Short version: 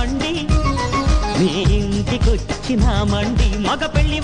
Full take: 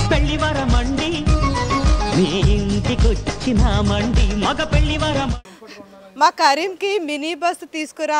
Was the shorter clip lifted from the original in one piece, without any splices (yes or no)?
yes